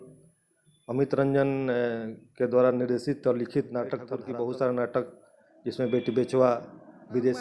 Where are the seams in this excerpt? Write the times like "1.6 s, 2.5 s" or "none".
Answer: 4.1 s